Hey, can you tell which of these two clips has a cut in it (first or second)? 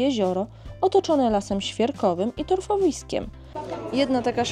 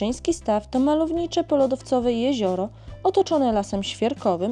first